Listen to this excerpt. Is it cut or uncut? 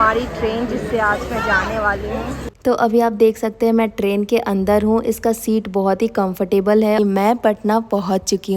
cut